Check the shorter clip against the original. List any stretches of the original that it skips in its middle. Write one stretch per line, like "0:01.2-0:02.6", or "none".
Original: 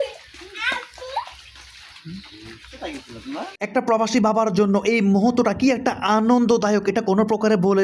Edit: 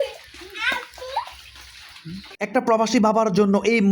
0:02.3-0:03.5